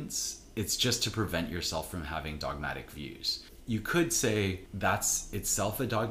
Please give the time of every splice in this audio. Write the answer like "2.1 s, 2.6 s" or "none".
3.5 s, 4.7 s